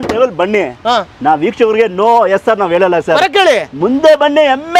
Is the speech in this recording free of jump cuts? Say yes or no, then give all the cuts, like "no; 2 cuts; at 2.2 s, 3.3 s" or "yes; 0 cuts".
yes; 0 cuts